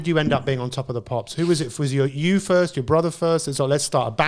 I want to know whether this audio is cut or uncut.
uncut